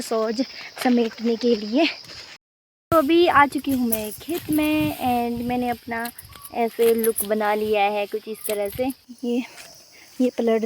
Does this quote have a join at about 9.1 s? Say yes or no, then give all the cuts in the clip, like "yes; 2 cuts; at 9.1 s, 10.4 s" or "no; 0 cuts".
yes; 2 cuts; at 2.3 s, 9.1 s